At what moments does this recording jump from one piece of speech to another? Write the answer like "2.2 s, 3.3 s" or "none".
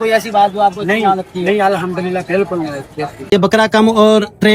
3.3 s